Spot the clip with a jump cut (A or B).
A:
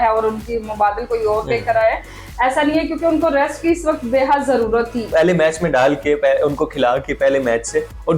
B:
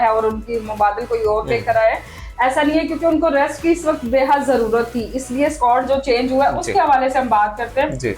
A